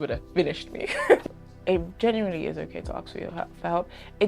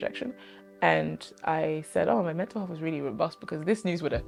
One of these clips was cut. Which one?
first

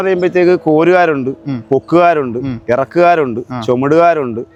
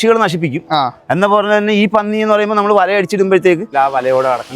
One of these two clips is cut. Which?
second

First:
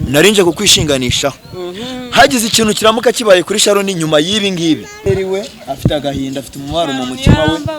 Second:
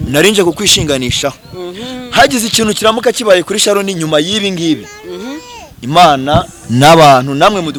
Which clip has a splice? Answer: first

